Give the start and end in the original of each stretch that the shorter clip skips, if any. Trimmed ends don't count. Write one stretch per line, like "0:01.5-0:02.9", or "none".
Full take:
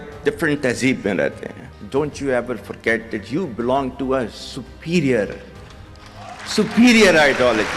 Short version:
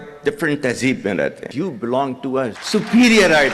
0:01.4-0:03.2
0:04.4-0:06.4